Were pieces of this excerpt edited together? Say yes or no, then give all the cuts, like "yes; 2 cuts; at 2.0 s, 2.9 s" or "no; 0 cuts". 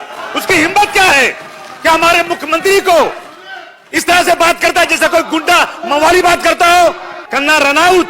yes; 1 cut; at 7.2 s